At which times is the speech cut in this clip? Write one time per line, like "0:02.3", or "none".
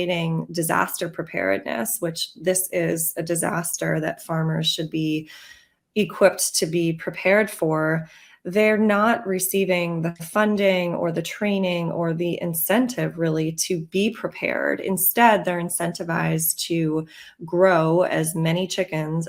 none

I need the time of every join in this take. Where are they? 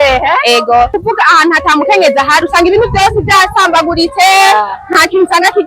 0:01.0

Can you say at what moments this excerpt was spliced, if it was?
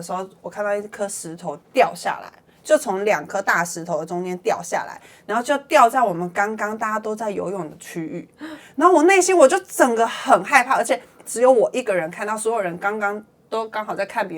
0:01.6

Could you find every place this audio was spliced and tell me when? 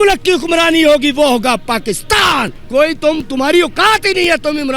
0:02.6

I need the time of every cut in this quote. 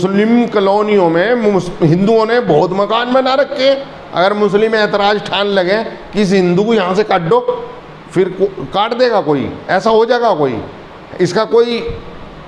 none

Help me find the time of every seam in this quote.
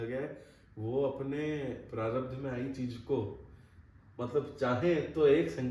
none

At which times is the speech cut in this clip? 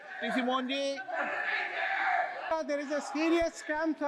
0:02.5

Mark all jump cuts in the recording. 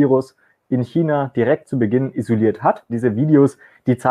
0:02.9

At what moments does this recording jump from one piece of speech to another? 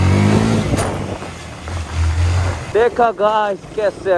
0:02.7

